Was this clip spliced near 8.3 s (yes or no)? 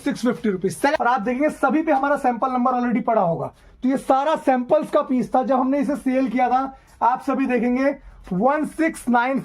no